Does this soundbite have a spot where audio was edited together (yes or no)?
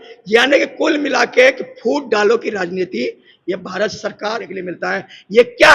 yes